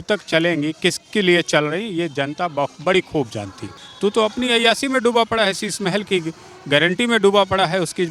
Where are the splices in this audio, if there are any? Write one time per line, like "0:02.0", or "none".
0:04.0